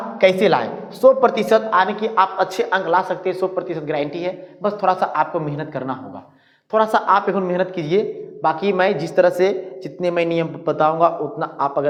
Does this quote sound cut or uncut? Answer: uncut